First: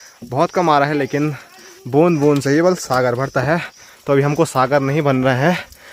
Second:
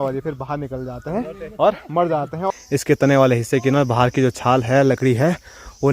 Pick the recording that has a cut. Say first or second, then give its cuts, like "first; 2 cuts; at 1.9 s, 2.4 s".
second; 1 cut; at 2.4 s